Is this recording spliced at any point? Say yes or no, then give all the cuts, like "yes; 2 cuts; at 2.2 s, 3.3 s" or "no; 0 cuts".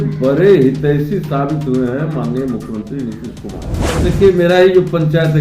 yes; 1 cut; at 3.9 s